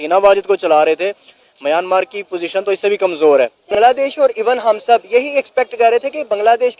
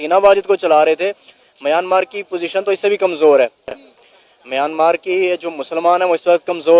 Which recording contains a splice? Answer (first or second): first